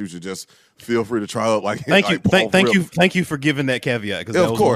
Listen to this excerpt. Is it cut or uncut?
uncut